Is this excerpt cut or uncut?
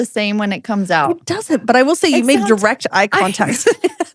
uncut